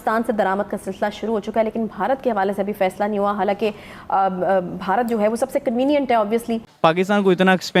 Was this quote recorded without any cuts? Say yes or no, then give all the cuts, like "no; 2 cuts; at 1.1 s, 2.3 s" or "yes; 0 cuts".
no; 1 cut; at 6.6 s